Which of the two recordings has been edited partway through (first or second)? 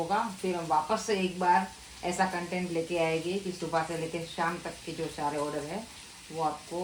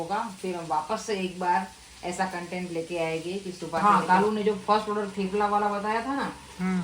second